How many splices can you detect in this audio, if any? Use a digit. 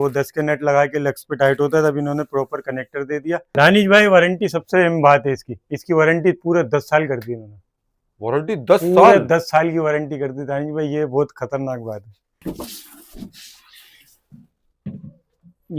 2